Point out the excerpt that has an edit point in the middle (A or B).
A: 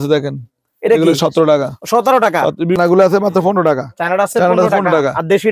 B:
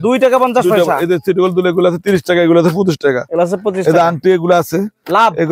A